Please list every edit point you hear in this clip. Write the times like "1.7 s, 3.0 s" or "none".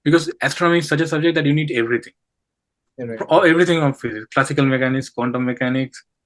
none